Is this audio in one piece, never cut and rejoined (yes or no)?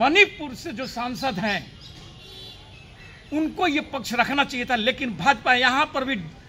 yes